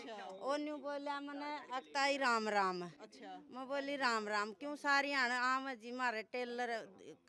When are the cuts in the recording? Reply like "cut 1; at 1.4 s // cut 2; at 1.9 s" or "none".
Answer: none